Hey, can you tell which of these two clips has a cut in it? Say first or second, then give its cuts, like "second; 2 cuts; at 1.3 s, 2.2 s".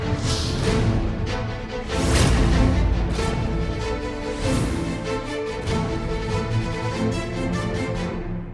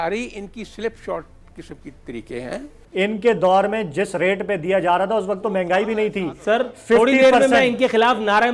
second; 1 cut; at 2.8 s